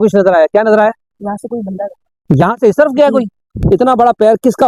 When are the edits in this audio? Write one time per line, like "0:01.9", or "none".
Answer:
0:03.5